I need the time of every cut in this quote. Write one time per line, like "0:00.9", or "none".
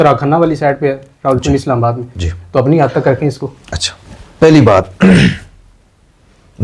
none